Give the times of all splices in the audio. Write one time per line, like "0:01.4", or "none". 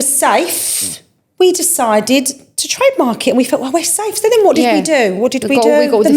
none